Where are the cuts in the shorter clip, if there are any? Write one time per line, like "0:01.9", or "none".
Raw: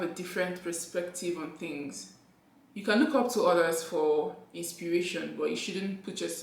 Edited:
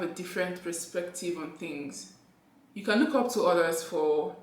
none